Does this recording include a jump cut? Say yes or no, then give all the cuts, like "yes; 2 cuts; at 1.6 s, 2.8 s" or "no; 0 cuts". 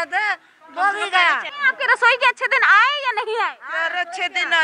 no; 0 cuts